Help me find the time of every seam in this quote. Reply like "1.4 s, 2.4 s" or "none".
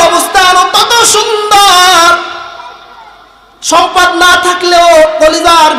none